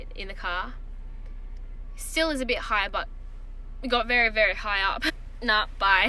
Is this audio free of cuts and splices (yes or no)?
no